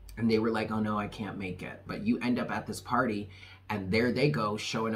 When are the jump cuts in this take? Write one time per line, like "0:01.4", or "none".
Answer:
0:01.8